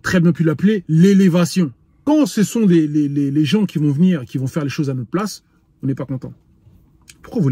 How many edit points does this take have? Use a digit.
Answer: 1